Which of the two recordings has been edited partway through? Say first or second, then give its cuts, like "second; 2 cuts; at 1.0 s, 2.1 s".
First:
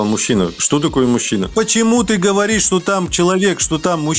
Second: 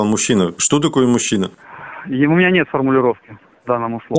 first; 1 cut; at 1.5 s